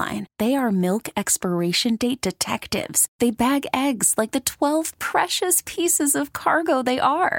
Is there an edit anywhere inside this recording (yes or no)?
no